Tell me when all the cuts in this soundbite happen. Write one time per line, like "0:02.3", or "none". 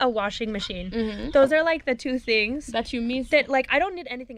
none